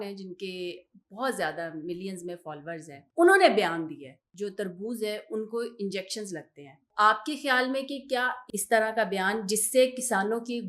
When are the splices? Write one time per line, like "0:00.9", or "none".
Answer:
0:03.0
0:04.2
0:06.9
0:08.4